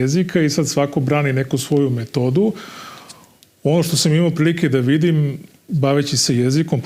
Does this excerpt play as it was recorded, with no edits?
yes; 0 cuts

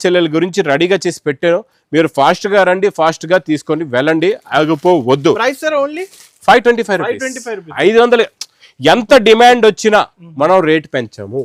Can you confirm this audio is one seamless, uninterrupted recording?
yes; 0 cuts

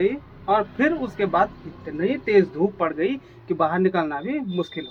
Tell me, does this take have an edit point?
no; 0 cuts

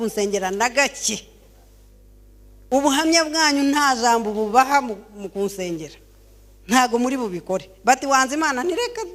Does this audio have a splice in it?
no; 0 cuts

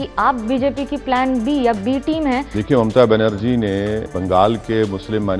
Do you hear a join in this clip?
yes; 2 cuts; at 2.5 s, 4.1 s

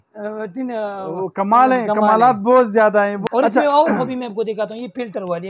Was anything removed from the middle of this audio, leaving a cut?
yes; 1 cut; at 3.2 s

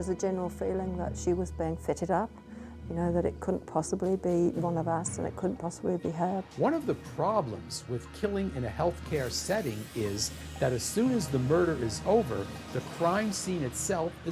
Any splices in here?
yes; 1 cut; at 6.5 s

